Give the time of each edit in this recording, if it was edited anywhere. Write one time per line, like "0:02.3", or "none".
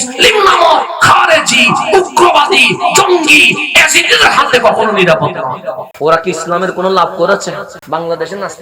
0:05.9
0:07.7